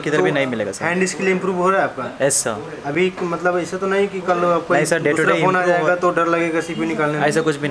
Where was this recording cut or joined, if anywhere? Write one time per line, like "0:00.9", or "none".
none